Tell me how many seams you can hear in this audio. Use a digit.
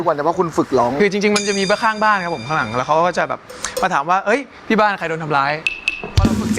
1